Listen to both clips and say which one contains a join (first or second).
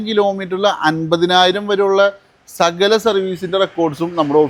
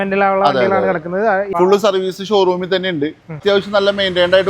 second